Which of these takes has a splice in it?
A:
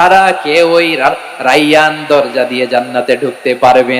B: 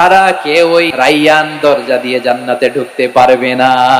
B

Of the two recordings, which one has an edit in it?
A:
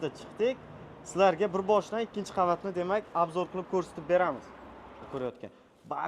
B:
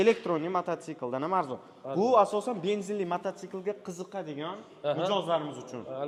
A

